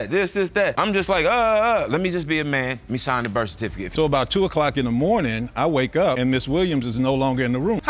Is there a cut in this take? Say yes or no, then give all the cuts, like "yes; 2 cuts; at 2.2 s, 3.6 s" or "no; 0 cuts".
yes; 2 cuts; at 0.8 s, 3.9 s